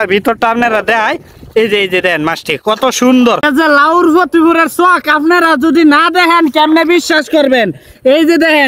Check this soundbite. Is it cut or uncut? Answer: cut